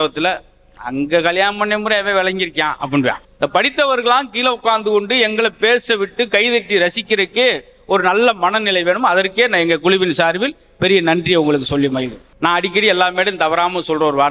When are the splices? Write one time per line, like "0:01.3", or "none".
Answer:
0:03.3
0:12.2